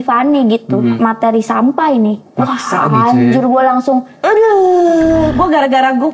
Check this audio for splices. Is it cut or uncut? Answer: cut